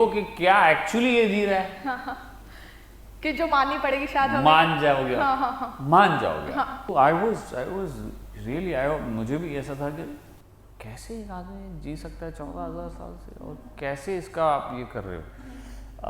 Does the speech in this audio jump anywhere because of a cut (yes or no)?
yes